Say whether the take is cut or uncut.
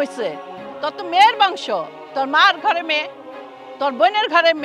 uncut